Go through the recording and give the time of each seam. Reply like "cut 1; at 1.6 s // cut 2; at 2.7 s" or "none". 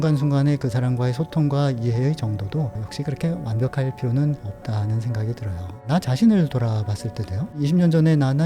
cut 1; at 5.8 s // cut 2; at 7.5 s

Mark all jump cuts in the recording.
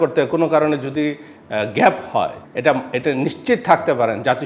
cut 1; at 2.4 s

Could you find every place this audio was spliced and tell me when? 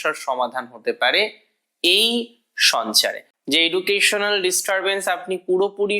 cut 1; at 3.3 s

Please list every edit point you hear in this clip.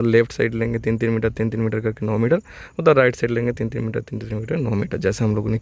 none

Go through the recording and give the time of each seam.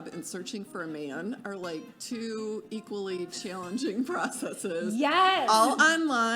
none

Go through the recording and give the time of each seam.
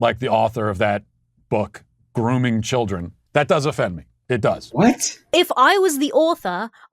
cut 1; at 5.1 s

